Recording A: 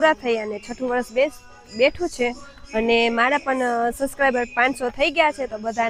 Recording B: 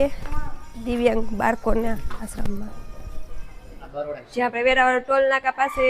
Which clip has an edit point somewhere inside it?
B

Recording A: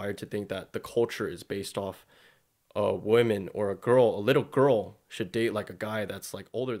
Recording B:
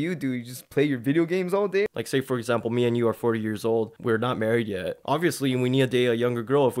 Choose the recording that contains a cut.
B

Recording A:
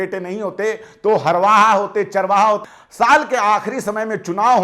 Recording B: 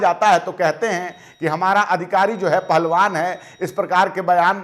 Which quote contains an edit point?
A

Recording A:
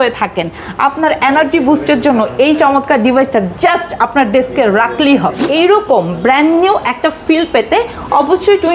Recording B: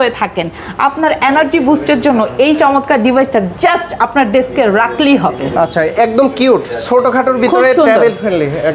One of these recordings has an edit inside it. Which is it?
A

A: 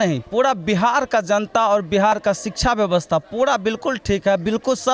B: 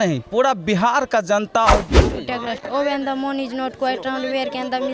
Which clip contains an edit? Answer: B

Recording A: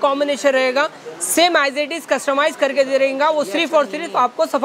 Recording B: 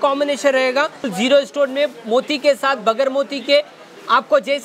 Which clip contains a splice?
B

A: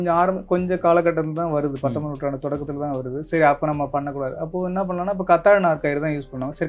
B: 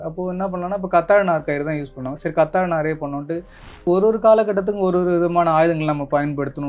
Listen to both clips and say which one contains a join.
B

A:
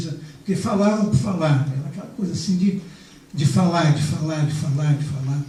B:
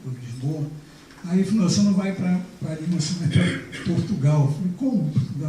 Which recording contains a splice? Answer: B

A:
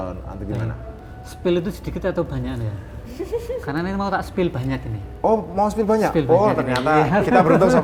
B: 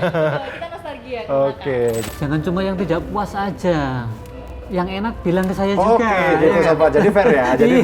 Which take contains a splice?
B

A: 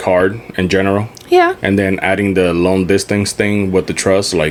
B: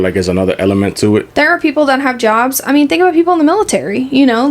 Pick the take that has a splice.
B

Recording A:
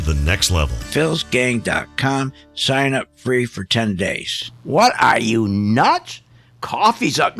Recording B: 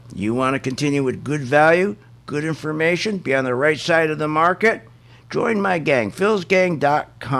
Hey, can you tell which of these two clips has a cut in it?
A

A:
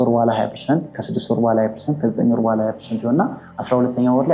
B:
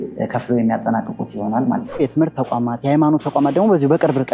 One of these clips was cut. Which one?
B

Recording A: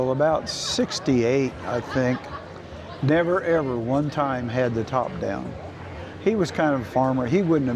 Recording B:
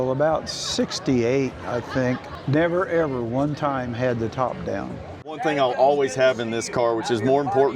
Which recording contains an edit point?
B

